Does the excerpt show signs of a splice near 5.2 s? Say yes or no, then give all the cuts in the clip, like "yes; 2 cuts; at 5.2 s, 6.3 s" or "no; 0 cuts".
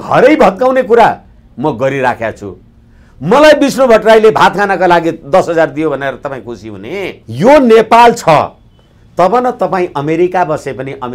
no; 1 cut; at 7.2 s